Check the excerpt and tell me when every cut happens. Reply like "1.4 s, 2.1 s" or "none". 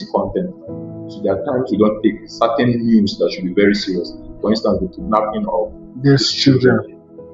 none